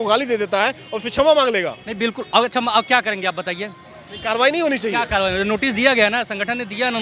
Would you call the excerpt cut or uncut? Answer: uncut